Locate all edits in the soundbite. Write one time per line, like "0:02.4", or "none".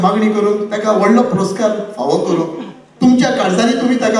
none

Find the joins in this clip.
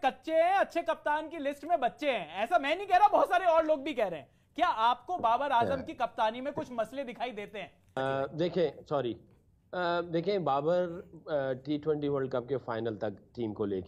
0:08.0

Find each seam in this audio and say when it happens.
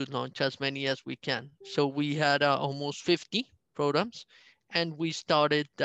0:01.6

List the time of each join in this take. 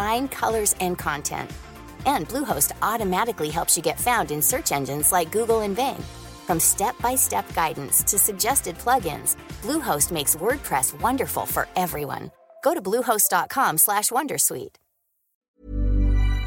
0:15.4

